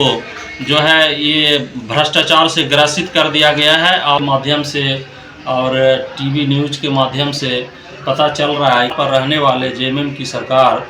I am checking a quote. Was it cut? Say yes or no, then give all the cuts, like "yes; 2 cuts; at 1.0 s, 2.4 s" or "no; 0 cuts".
yes; 2 cuts; at 4.2 s, 8.9 s